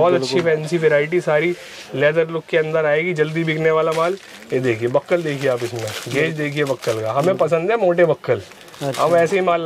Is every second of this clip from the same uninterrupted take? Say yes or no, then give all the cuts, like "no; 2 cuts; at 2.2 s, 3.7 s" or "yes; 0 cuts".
yes; 0 cuts